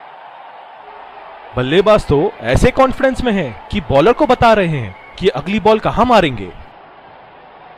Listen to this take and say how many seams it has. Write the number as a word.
two